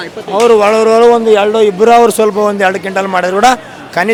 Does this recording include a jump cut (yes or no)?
no